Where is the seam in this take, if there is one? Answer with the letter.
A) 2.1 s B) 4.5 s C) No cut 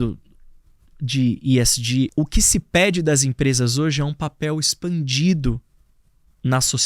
A